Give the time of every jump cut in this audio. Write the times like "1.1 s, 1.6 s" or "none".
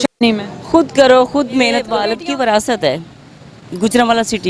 2.0 s

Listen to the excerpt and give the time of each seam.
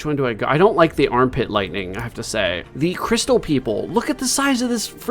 2.6 s

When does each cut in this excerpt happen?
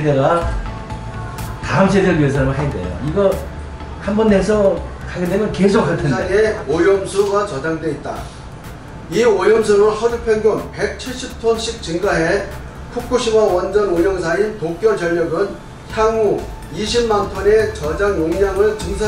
6.2 s

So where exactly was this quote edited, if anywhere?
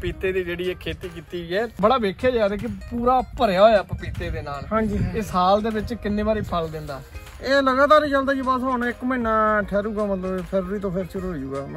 1.8 s

